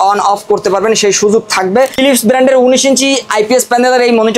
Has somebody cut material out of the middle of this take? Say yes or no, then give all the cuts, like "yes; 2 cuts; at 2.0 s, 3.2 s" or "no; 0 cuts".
yes; 1 cut; at 2.0 s